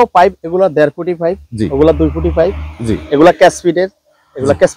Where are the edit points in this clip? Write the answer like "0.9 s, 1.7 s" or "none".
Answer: none